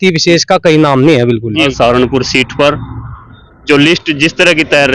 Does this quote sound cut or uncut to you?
cut